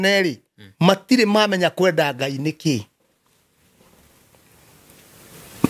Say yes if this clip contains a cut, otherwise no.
no